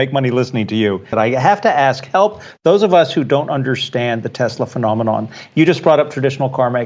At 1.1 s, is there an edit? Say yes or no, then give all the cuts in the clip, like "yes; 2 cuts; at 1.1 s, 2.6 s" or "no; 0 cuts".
yes; 2 cuts; at 1.1 s, 5.4 s